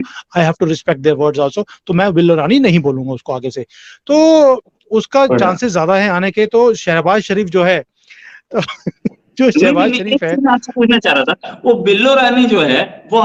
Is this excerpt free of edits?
yes; 0 cuts

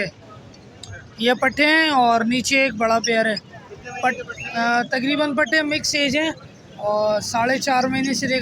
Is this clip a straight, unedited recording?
yes; 0 cuts

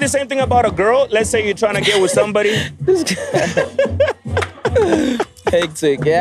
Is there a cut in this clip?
no; 0 cuts

